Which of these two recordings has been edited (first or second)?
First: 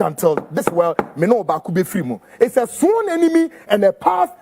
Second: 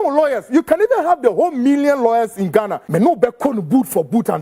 second